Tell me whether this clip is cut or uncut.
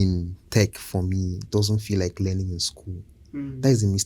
uncut